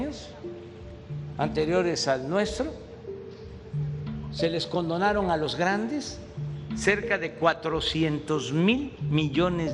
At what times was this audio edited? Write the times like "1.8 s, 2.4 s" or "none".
2.7 s, 4.4 s